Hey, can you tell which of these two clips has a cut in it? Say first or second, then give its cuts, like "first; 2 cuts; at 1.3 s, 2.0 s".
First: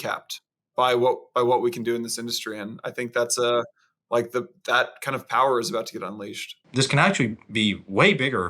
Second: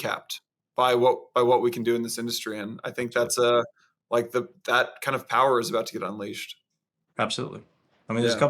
first; 1 cut; at 6.6 s